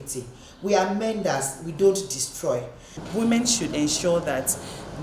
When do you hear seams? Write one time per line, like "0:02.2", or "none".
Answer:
0:03.0